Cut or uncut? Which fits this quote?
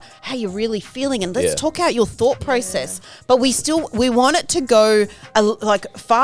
uncut